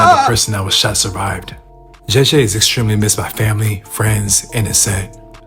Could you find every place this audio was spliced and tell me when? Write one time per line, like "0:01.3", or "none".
none